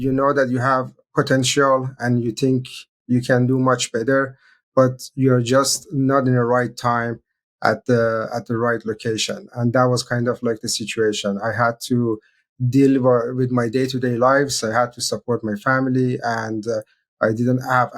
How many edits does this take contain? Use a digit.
1